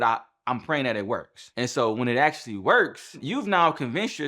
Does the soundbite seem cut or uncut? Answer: cut